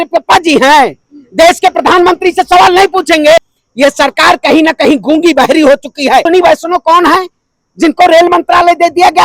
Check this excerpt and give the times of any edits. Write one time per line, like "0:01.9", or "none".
0:03.4
0:06.2

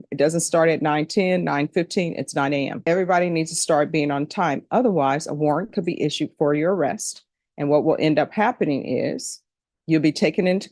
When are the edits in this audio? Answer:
0:02.8

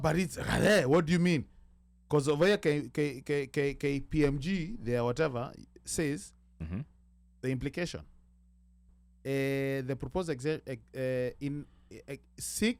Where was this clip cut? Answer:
none

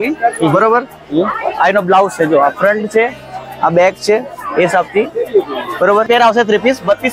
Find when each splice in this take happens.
0:06.1

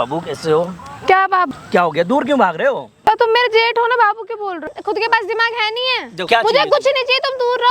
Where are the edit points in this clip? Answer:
0:01.5
0:02.9
0:04.7
0:06.3

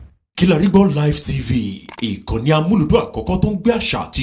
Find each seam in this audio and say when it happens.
none

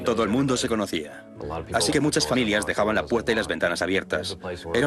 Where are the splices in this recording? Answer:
0:02.5

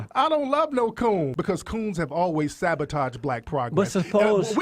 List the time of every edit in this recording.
0:01.3

